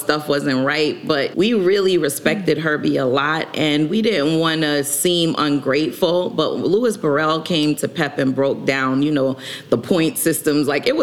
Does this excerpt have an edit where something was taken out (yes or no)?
yes